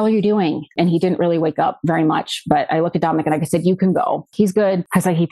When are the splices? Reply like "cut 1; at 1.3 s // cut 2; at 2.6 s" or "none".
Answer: cut 1; at 4.3 s